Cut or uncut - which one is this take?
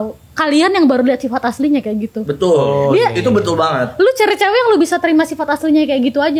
uncut